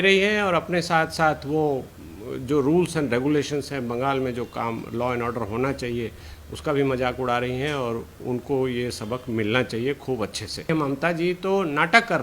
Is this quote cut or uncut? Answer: cut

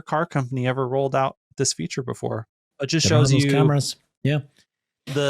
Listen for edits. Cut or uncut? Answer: cut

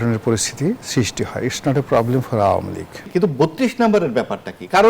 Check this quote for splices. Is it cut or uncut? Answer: cut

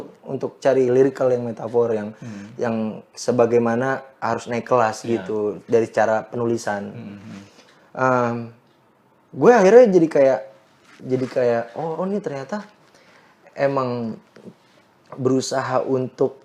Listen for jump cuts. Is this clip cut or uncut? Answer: uncut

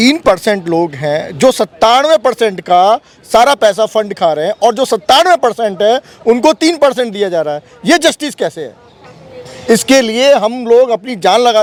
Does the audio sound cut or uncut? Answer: uncut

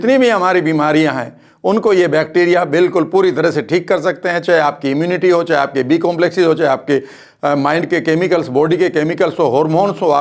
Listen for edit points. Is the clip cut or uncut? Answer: uncut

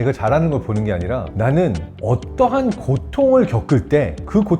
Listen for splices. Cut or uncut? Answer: cut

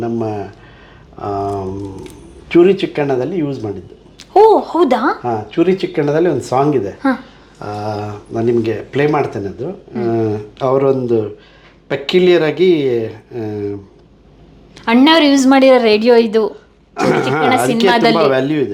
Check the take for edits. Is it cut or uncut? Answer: uncut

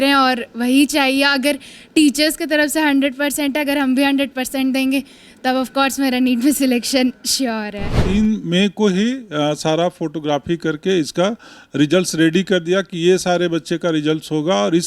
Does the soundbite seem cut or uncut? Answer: cut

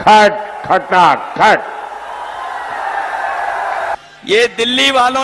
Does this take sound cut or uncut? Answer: uncut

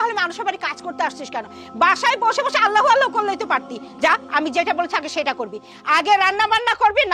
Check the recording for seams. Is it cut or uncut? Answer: uncut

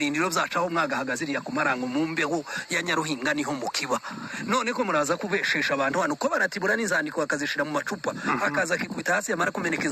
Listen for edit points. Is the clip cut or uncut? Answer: cut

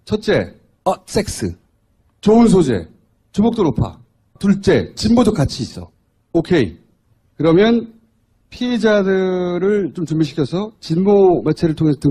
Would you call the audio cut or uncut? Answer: uncut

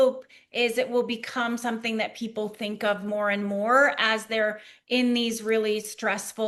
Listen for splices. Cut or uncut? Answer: uncut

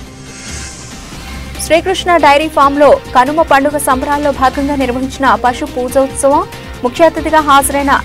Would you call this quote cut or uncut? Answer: cut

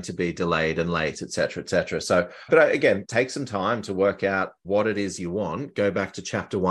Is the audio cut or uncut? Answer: cut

